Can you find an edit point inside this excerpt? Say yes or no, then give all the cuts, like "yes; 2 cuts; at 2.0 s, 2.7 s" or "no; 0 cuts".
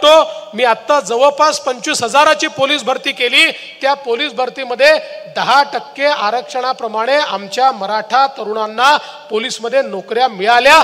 no; 0 cuts